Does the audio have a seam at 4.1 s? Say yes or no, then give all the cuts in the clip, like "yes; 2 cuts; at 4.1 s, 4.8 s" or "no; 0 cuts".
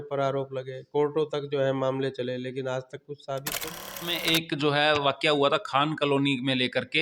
yes; 1 cut; at 4.1 s